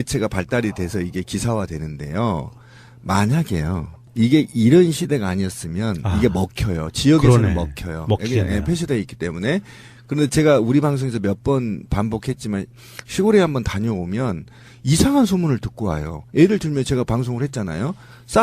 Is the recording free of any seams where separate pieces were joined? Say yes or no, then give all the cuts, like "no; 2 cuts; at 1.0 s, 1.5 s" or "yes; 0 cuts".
no; 1 cut; at 1.1 s